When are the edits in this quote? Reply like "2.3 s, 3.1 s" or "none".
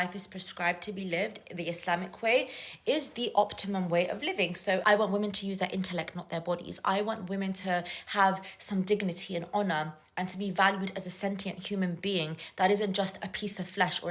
4.8 s

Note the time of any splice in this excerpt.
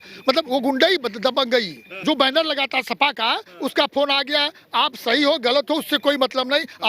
2.0 s

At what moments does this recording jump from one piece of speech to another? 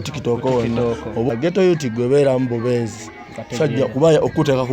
1.3 s

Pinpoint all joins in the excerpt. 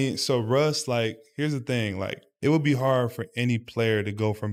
none

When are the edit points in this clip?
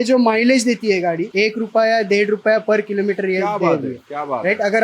1.3 s

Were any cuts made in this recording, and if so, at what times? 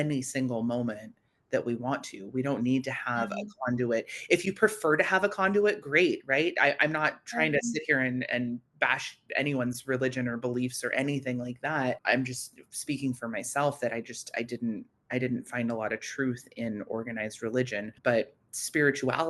8.7 s, 12.0 s, 17.9 s

